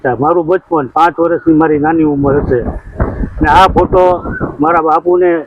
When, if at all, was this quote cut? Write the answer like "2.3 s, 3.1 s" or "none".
none